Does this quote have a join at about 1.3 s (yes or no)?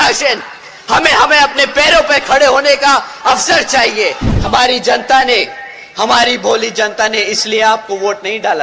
no